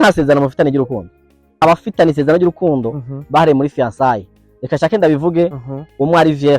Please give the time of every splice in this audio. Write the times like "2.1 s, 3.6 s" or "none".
1.6 s